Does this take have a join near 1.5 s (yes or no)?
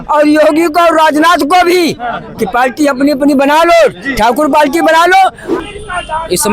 no